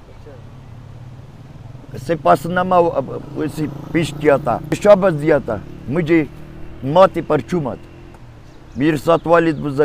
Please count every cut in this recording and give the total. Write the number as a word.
one